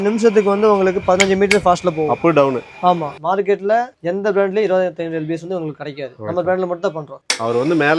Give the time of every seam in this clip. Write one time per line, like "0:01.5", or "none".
0:03.1
0:07.2